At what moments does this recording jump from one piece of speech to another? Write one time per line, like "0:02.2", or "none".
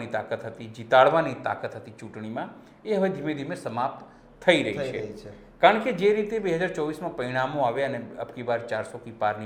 none